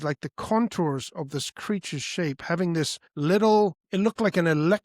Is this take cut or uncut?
cut